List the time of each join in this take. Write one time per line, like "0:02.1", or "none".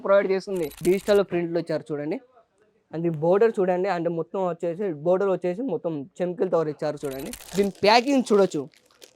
0:00.8
0:07.4